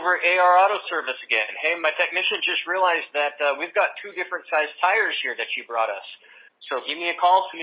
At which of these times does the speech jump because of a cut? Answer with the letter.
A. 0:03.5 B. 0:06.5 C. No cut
B